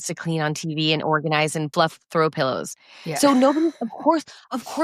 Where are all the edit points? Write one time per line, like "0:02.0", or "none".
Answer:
0:01.7

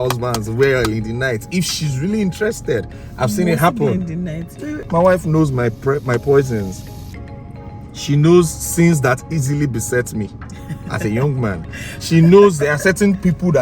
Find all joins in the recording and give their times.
0:04.7

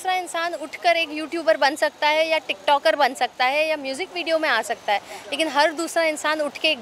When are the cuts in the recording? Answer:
none

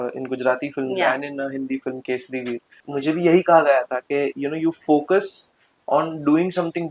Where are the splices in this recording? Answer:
0:02.7

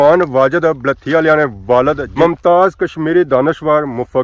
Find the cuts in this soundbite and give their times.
0:02.1

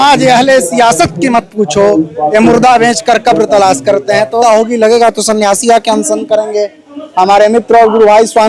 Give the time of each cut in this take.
0:04.4

